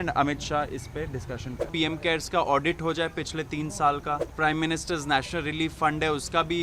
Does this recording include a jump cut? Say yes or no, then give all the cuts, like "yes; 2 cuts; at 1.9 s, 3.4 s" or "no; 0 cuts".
yes; 2 cuts; at 1.7 s, 4.3 s